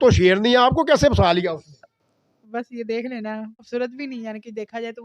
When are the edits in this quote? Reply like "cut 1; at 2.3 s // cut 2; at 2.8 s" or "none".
cut 1; at 3.6 s